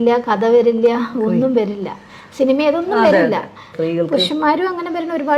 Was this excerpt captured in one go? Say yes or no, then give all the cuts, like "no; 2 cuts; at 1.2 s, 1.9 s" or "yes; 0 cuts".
no; 1 cut; at 3.7 s